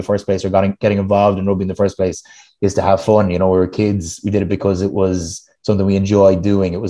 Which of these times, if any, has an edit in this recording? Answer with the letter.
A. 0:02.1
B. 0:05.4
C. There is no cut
C